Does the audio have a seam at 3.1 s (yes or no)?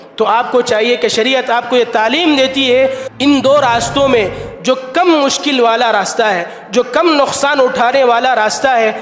yes